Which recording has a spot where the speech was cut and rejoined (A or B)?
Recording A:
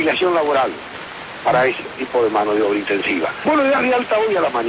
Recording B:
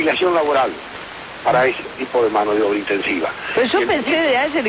B